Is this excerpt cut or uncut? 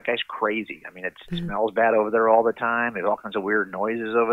uncut